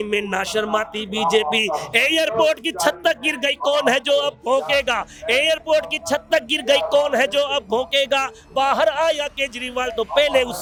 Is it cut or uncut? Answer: uncut